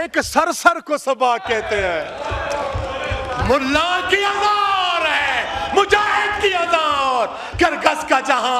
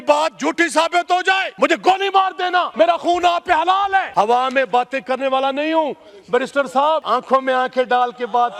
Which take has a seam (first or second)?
second